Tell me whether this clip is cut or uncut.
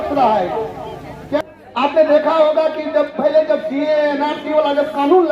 cut